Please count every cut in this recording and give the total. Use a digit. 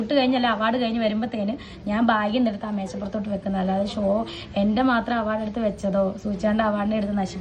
0